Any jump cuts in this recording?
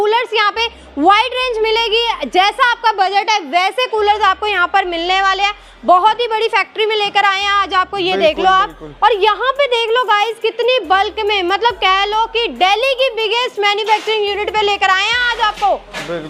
no; 0 cuts

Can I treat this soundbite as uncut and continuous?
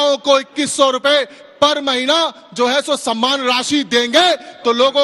yes; 0 cuts

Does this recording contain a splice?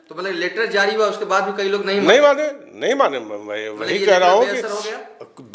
no; 0 cuts

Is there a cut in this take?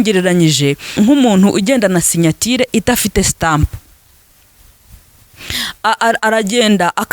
yes; 1 cut; at 0.9 s

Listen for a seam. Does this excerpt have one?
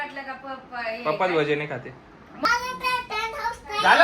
yes; 1 cut; at 2.4 s

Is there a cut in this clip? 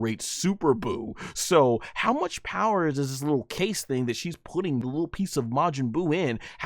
yes; 1 cut; at 4.8 s

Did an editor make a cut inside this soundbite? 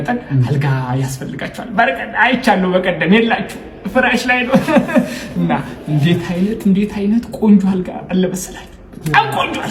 no; 0 cuts

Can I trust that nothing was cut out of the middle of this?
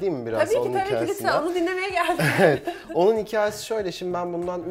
yes; 0 cuts

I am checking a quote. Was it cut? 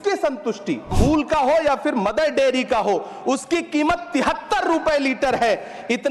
yes; 1 cut; at 0.9 s

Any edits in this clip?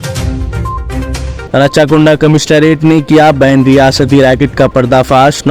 yes; 1 cut; at 1.4 s

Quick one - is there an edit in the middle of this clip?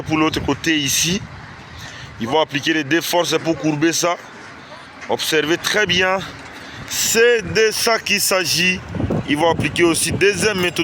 no; 0 cuts

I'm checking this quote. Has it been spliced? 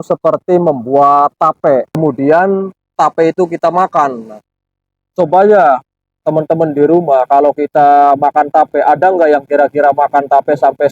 yes; 1 cut; at 1.9 s

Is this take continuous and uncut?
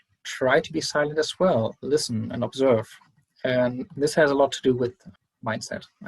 no; 1 cut; at 5.0 s

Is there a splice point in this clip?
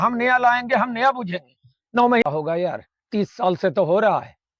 yes; 1 cut; at 2.2 s

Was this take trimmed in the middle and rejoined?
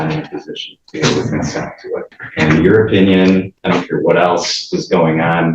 yes; 2 cuts; at 2.2 s, 3.5 s

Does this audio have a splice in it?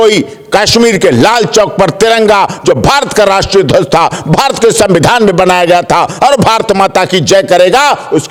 no; 0 cuts

